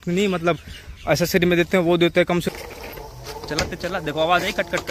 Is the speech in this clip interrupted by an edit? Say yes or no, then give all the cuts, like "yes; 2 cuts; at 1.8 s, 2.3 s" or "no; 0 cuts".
yes; 1 cut; at 2.5 s